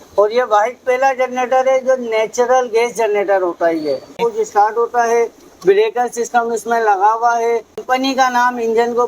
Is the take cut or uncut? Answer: cut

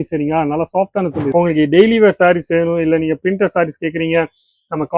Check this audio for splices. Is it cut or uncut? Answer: cut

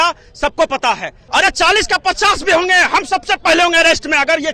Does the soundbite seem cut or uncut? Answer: cut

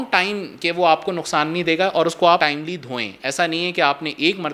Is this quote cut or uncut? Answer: uncut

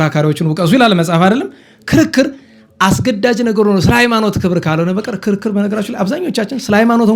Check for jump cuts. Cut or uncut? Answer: uncut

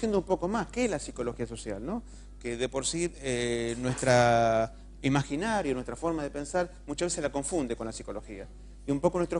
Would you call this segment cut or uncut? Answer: uncut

